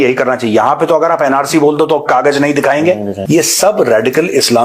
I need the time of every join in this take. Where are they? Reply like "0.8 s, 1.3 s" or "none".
3.1 s